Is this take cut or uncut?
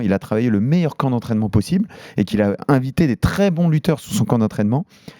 uncut